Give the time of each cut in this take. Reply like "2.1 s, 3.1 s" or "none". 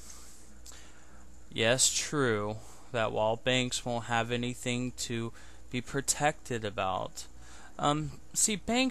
none